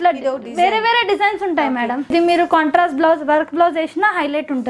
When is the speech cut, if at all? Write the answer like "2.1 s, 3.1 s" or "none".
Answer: 2.1 s